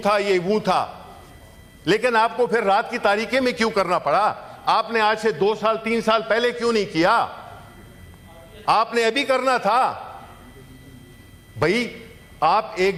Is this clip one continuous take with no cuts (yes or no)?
yes